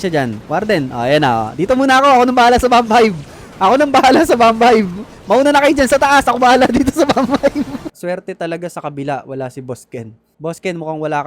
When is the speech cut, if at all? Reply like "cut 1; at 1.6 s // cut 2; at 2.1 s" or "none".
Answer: cut 1; at 7.9 s